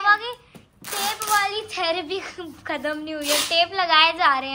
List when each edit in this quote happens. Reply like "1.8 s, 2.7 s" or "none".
none